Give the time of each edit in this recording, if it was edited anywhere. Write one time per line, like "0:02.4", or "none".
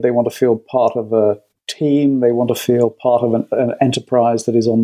none